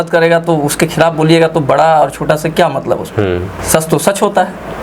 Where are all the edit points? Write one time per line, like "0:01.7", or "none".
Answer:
none

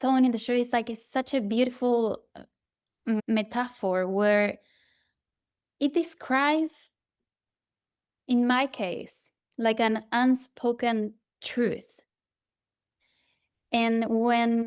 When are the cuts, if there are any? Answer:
0:03.2

